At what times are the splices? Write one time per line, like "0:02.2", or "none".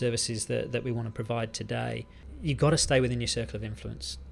0:02.2